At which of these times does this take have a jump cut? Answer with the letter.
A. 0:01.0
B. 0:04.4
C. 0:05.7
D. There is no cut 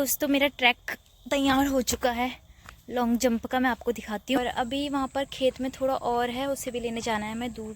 B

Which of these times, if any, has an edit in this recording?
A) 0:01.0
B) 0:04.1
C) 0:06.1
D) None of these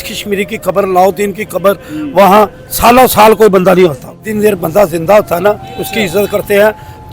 B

